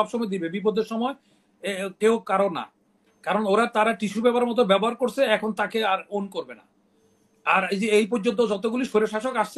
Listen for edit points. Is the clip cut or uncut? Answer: uncut